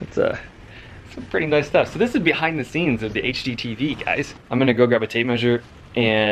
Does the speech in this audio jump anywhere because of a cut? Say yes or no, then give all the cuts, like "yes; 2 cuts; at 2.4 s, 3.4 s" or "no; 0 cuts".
yes; 1 cut; at 4.4 s